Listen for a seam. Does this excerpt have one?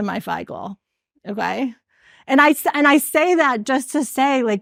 no; 0 cuts

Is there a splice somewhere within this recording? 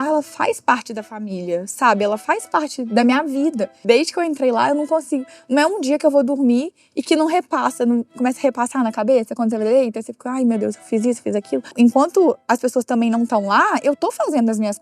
yes; 2 cuts; at 3.8 s, 11.7 s

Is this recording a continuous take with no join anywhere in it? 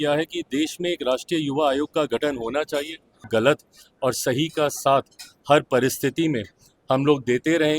no; 1 cut; at 3.3 s

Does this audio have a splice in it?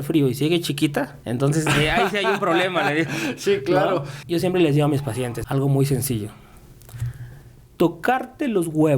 yes; 3 cuts; at 1.2 s, 4.1 s, 5.4 s

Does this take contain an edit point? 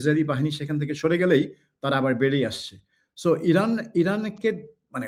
no; 0 cuts

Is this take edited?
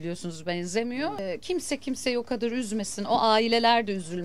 yes; 1 cut; at 1.2 s

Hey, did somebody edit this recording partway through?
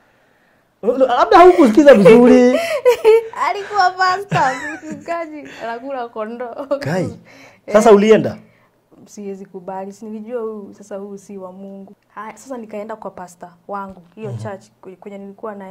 yes; 1 cut; at 11.9 s

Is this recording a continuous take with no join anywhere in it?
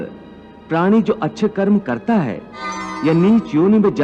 no; 1 cut; at 2.9 s

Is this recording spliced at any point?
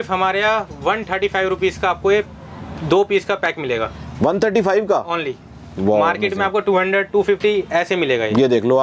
no; 0 cuts

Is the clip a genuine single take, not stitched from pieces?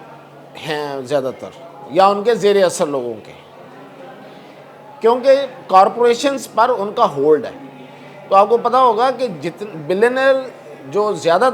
yes; 0 cuts

